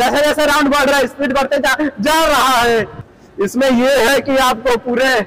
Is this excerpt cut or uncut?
uncut